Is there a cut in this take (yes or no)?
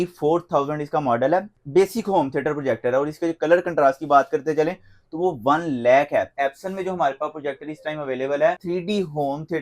yes